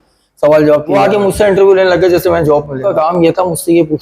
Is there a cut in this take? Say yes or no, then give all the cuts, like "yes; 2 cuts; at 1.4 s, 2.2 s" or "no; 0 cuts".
yes; 2 cuts; at 0.9 s, 2.9 s